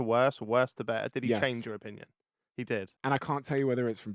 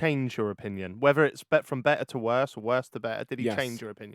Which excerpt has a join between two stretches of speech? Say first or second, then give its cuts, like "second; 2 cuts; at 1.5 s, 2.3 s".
first; 1 cut; at 2.9 s